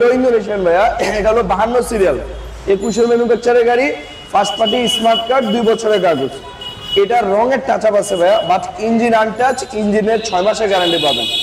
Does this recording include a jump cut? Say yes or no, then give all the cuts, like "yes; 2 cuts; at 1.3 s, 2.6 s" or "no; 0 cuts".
no; 0 cuts